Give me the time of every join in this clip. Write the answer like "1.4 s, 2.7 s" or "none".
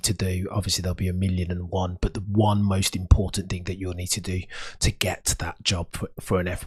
none